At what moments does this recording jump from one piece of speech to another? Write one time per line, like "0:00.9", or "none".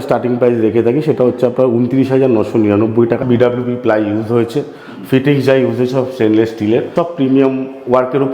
0:03.2
0:06.9

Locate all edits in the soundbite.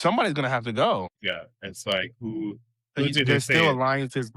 0:01.1

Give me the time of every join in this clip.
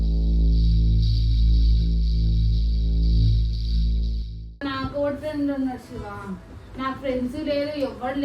0:04.6

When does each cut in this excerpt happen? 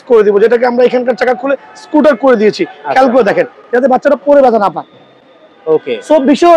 none

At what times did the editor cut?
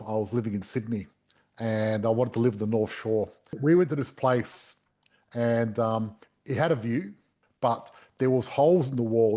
0:03.5

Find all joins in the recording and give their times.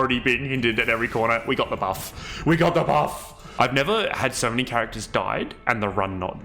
0:03.4

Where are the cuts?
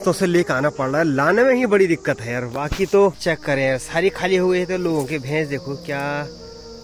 0:03.2

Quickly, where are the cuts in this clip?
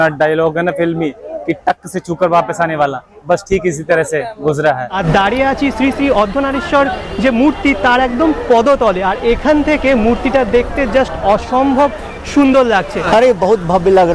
0:05.0
0:13.0

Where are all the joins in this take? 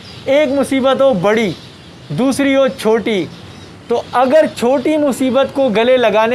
none

